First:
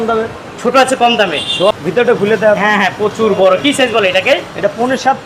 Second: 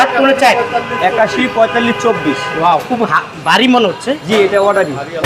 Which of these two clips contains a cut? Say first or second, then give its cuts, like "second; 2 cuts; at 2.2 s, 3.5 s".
first; 1 cut; at 1.8 s